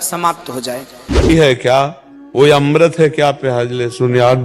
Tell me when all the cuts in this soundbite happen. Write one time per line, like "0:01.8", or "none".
0:01.3